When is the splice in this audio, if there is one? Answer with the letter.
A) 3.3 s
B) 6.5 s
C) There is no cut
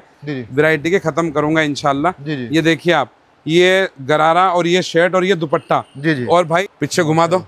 B